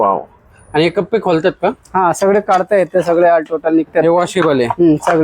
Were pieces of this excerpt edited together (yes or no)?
no